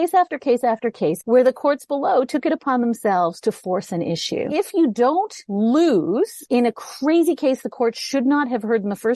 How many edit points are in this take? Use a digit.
4